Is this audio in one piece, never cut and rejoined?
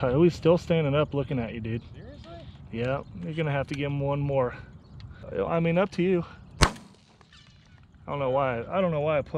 no; 1 cut; at 5.2 s

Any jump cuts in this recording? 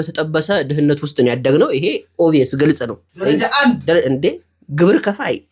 no; 0 cuts

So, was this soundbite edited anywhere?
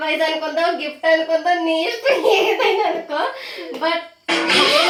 no; 0 cuts

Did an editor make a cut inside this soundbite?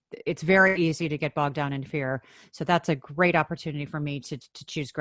no; 0 cuts

